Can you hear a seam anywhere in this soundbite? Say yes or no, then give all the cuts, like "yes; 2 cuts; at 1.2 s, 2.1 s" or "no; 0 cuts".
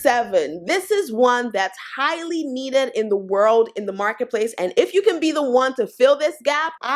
no; 0 cuts